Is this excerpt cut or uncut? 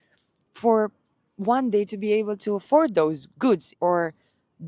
cut